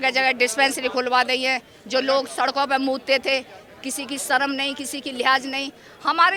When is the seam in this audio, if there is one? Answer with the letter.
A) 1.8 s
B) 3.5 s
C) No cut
C